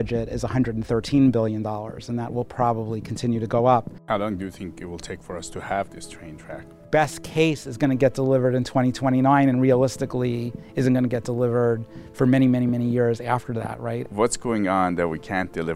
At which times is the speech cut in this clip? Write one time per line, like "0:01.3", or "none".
0:03.9
0:06.8
0:14.0